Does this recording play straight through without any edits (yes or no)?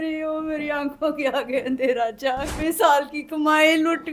no